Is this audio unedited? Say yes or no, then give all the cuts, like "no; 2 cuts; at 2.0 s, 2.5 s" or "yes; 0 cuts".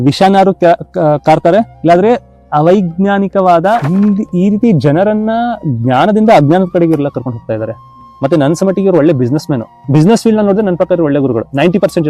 no; 1 cut; at 3.8 s